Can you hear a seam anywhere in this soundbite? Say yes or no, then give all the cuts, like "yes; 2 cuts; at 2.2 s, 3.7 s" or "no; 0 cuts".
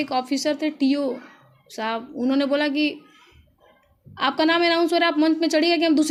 no; 0 cuts